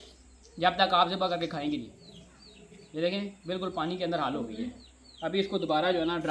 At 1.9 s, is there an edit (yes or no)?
no